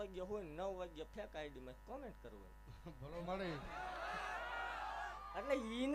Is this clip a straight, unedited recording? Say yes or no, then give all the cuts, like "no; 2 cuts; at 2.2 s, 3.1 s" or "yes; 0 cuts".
yes; 0 cuts